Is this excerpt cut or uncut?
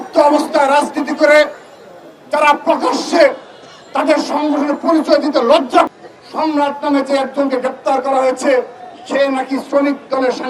cut